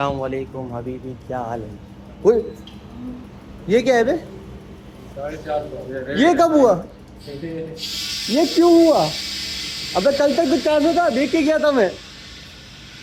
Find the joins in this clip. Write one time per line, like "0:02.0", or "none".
none